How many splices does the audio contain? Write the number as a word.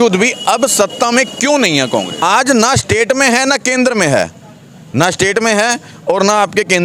one